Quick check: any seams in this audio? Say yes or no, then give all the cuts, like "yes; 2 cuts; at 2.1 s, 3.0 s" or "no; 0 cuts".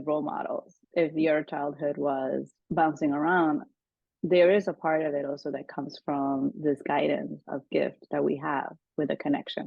yes; 1 cut; at 2.6 s